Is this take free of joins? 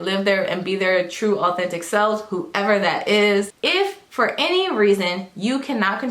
no; 1 cut; at 3.5 s

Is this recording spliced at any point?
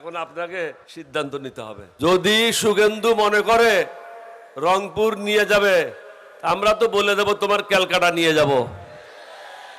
yes; 2 cuts; at 0.9 s, 1.9 s

